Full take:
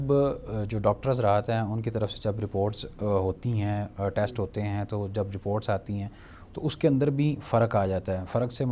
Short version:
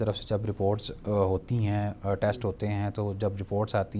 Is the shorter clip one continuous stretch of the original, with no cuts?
yes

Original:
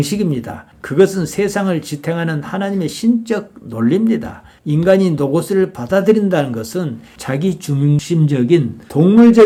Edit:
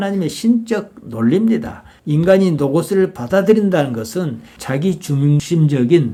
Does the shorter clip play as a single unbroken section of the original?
yes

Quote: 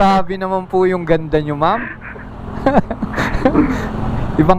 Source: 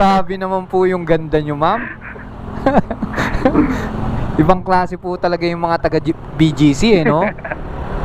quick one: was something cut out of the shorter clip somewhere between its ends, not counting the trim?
no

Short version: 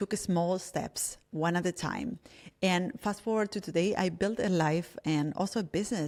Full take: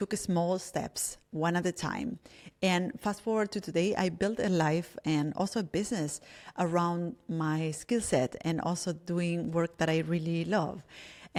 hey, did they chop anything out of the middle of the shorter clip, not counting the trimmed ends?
no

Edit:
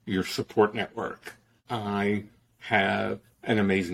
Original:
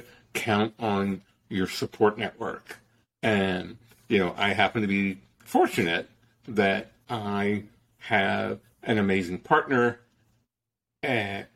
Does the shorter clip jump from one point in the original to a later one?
yes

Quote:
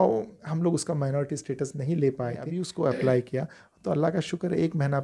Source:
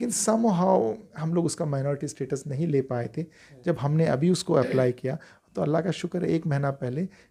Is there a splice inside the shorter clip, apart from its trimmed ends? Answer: yes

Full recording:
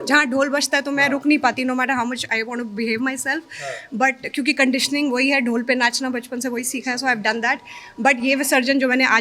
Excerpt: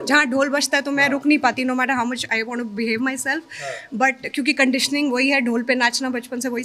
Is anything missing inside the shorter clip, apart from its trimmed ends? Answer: no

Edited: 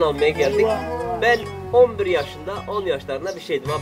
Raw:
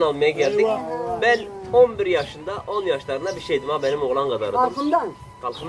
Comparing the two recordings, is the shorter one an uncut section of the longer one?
yes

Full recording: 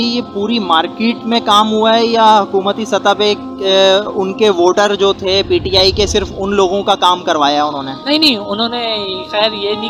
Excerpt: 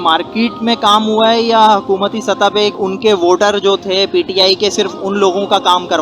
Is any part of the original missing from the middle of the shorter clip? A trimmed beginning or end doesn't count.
yes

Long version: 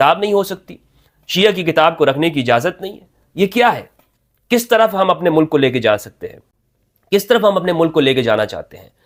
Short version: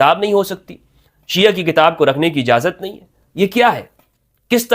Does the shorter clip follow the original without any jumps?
yes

